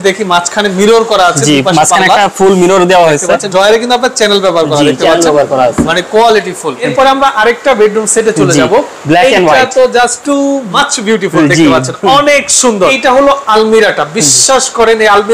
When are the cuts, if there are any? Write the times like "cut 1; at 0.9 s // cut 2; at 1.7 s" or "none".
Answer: cut 1; at 3.5 s // cut 2; at 6.8 s // cut 3; at 10.5 s // cut 4; at 13.0 s